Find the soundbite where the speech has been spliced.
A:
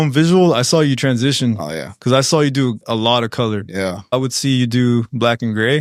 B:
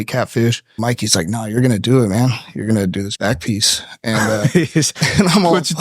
B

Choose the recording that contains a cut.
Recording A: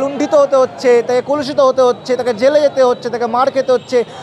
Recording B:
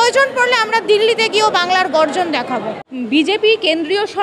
B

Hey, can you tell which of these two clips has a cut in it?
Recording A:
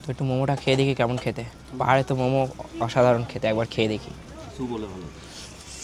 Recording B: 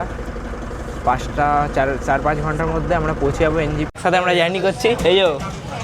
B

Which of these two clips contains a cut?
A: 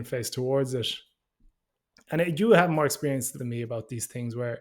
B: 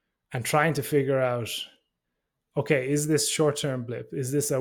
A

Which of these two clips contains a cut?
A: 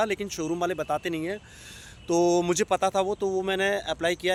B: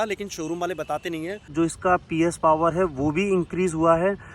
B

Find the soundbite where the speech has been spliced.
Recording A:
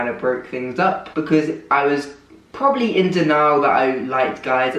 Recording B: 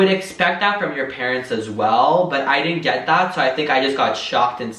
A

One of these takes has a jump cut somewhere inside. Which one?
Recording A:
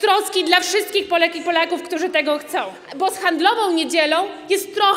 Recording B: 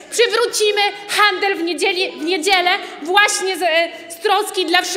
A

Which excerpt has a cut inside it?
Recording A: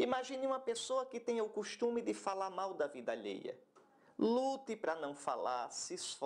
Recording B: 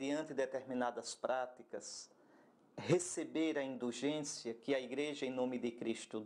B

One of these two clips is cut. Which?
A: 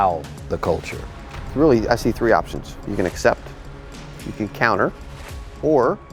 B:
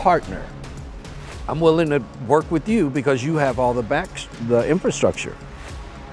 A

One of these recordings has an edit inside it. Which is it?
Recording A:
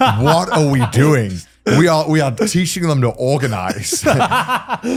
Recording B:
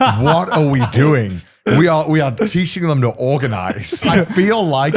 B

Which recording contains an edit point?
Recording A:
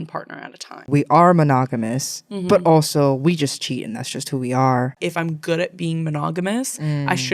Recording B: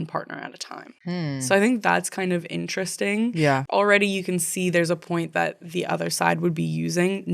A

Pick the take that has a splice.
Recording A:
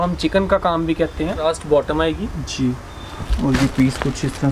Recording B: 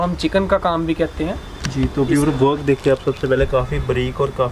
A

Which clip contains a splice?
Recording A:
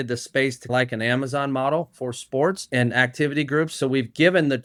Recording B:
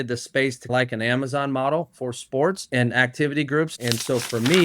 B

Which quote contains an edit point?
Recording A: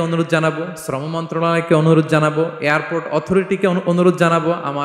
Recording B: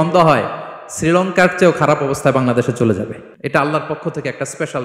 B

